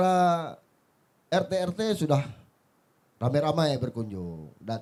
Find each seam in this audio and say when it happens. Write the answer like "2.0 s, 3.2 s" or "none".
none